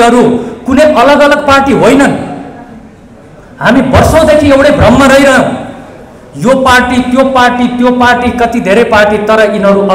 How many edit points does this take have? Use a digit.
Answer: 0